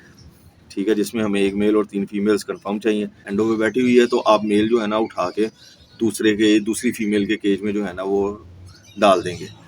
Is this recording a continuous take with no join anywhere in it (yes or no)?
no